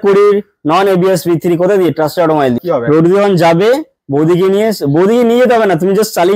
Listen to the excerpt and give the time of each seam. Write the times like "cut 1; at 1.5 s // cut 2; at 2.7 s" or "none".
cut 1; at 2.6 s